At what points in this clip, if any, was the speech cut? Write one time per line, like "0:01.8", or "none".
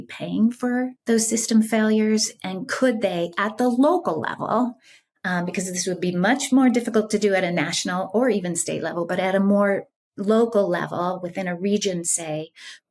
0:00.9